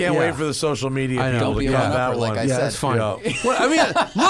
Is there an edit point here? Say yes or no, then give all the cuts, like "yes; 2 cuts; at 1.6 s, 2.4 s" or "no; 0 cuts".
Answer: no; 0 cuts